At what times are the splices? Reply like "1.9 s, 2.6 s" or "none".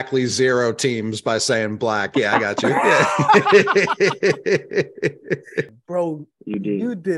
5.8 s